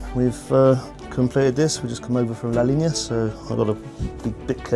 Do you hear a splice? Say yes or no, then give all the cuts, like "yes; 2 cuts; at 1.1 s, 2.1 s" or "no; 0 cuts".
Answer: no; 0 cuts